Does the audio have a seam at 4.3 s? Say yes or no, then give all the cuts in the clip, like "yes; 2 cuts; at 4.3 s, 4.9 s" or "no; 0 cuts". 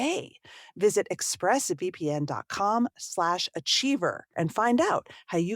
yes; 1 cut; at 4.3 s